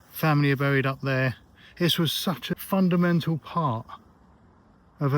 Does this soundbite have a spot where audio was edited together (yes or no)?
yes